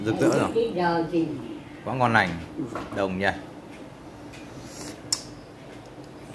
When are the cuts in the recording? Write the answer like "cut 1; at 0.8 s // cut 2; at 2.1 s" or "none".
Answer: none